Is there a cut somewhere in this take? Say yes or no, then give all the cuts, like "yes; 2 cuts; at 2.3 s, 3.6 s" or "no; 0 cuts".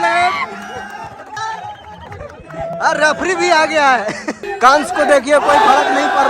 yes; 1 cut; at 1.2 s